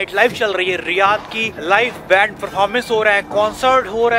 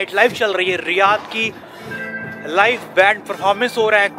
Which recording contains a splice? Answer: first; 1 cut; at 1.5 s

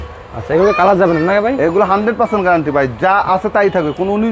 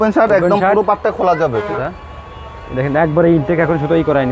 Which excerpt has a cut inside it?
second; 1 cut; at 1.7 s

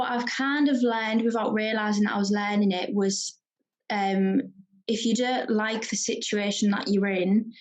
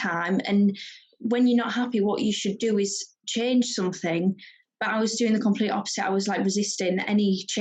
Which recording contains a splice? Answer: second; 1 cut; at 3.1 s

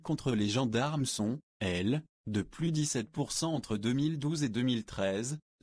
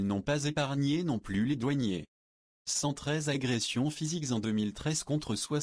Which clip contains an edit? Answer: first; 1 cut; at 2.8 s

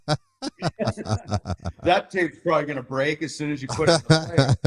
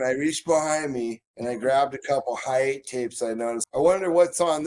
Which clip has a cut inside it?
second; 2 cuts; at 1.3 s, 3.6 s

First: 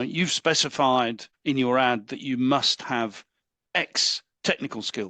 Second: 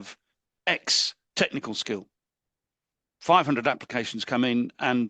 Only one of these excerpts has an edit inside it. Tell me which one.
first; 1 cut; at 1.3 s

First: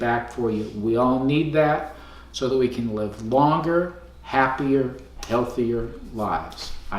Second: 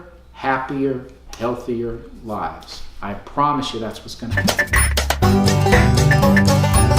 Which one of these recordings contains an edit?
second; 1 cut; at 4.3 s

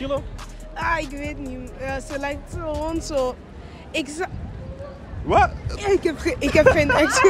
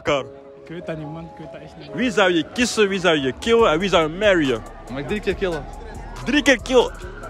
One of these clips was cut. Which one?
second; 2 cuts; at 1.8 s, 4.8 s

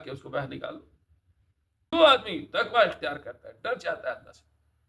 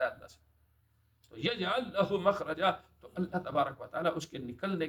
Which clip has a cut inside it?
first; 1 cut; at 1.9 s

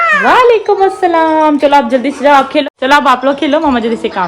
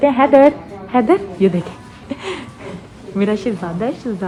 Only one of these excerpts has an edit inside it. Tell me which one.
first; 1 cut; at 2.6 s

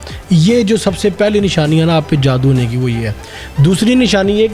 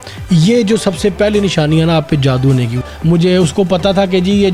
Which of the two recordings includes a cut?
second; 1 cut; at 2.8 s

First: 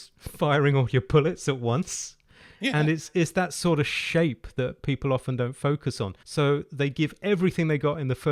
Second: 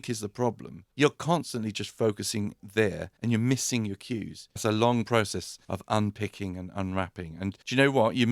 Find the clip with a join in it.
second; 1 cut; at 4.6 s

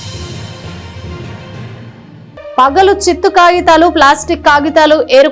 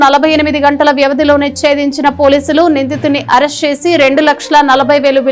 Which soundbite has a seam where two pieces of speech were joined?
first; 1 cut; at 2.2 s

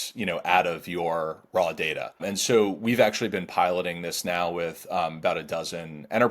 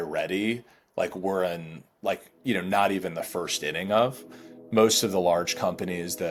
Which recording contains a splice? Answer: first; 1 cut; at 2.2 s

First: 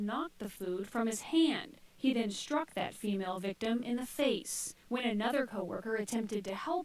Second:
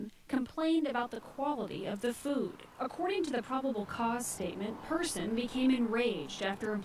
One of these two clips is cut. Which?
first; 3 cuts; at 1.8 s, 4.1 s, 5.6 s

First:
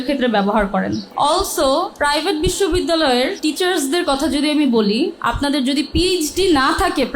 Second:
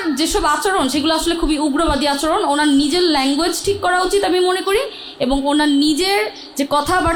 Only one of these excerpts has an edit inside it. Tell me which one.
first; 4 cuts; at 1.1 s, 1.9 s, 3.4 s, 5.2 s

